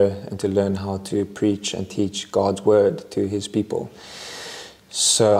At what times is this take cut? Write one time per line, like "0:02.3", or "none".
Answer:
none